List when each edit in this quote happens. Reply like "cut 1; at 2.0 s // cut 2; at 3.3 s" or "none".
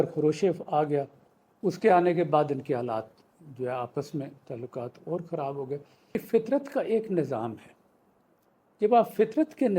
cut 1; at 6.2 s